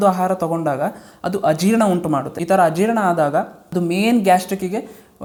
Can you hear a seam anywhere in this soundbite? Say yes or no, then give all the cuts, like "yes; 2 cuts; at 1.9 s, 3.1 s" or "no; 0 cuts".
no; 0 cuts